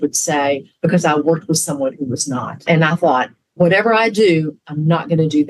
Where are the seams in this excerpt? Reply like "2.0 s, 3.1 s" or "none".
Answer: 2.5 s, 3.6 s